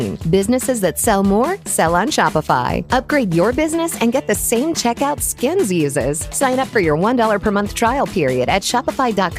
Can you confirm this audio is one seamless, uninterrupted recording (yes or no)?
yes